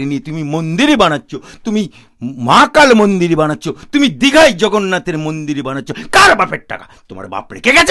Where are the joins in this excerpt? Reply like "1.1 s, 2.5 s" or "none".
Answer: none